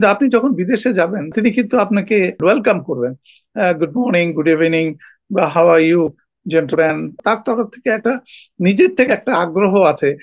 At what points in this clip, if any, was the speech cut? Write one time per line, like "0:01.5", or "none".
0:01.3
0:02.4
0:07.2